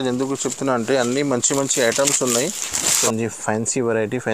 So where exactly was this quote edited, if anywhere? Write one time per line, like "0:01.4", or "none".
0:03.0